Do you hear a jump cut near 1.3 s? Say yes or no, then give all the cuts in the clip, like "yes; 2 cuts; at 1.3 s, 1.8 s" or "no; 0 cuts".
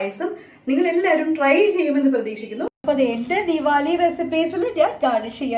no; 1 cut; at 2.7 s